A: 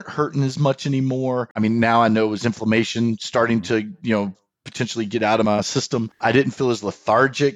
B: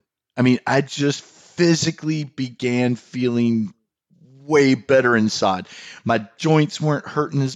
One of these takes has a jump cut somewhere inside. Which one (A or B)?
A